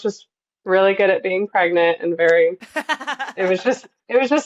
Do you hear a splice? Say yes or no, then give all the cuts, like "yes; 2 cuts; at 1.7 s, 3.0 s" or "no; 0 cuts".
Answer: no; 0 cuts